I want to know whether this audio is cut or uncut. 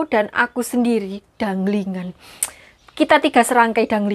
uncut